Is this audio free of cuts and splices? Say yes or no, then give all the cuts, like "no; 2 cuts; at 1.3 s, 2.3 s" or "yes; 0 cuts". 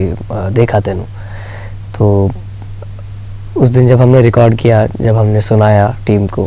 yes; 0 cuts